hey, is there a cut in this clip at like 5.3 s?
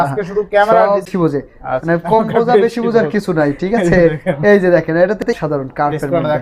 yes; 2 cuts; at 1.1 s, 5.3 s

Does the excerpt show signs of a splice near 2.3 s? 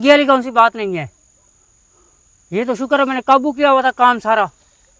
no; 0 cuts

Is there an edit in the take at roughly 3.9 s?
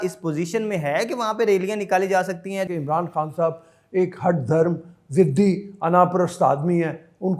no; 1 cut; at 2.7 s

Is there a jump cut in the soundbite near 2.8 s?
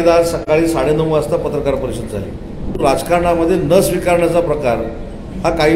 yes; 1 cut; at 2.8 s

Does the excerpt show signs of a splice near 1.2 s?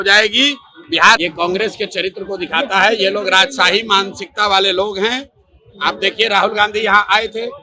yes; 1 cut; at 1.2 s

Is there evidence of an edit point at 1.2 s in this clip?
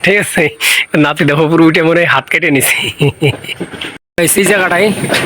no; 1 cut; at 4.1 s

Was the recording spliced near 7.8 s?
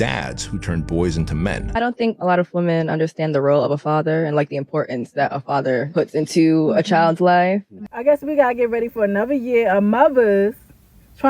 yes; 2 cuts; at 1.6 s, 7.8 s

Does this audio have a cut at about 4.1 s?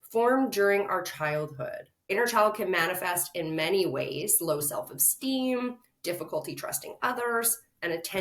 no; 1 cut; at 2.1 s

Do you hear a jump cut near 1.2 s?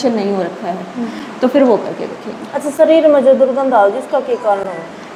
no; 0 cuts

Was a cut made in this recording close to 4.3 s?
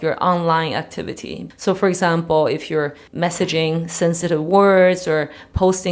no; 2 cuts; at 1.4 s, 3.0 s

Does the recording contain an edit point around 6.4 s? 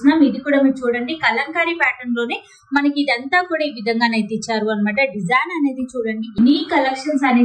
yes; 1 cut; at 6.4 s

